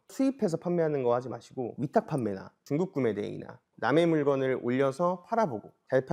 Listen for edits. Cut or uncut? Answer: cut